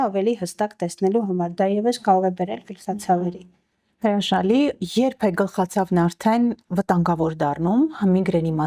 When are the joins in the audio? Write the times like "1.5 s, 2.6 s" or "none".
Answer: none

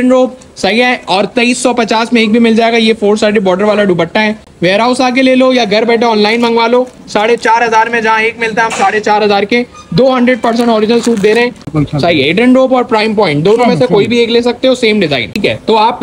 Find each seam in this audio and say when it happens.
none

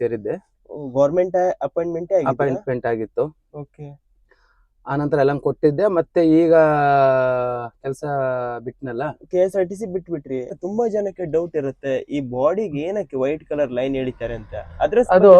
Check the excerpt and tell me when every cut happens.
10.5 s

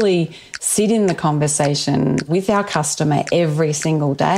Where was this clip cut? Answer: 2.3 s

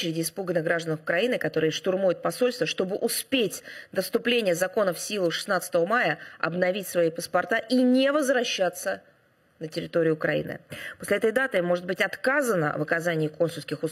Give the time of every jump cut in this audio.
none

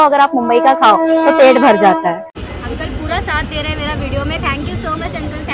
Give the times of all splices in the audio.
2.4 s

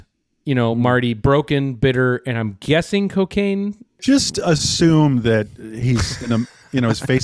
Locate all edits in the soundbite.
4.0 s

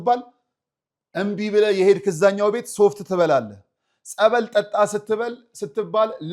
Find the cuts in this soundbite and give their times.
none

